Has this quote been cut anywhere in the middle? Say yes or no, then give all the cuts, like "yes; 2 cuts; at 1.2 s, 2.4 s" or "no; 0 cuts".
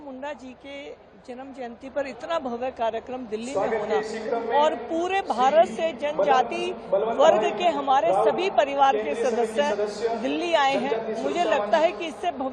no; 0 cuts